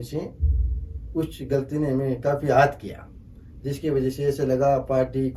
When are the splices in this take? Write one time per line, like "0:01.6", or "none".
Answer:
none